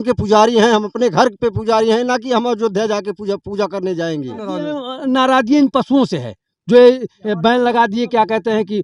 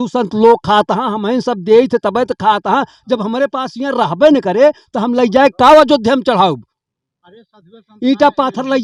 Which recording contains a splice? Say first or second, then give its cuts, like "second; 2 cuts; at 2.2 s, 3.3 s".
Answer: first; 1 cut; at 4.7 s